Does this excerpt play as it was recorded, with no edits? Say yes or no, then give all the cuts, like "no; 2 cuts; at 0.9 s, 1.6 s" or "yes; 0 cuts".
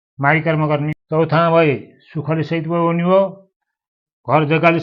no; 1 cut; at 1.0 s